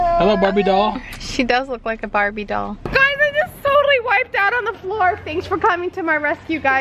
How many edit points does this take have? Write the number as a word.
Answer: one